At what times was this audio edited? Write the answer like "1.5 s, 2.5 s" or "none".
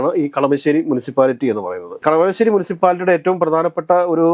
none

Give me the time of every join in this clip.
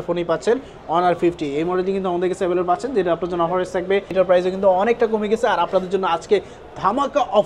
4.1 s

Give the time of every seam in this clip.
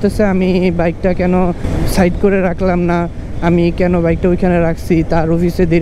none

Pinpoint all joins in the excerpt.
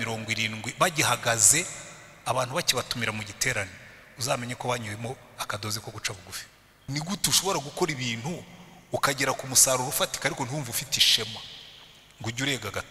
6.9 s

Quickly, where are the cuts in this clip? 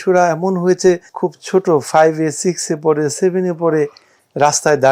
1.1 s

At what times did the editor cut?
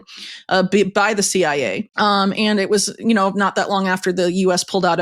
1.8 s

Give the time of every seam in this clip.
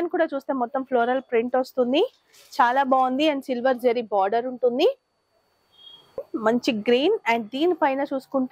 6.3 s

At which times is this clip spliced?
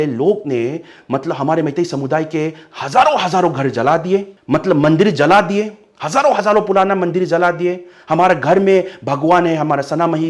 4.3 s

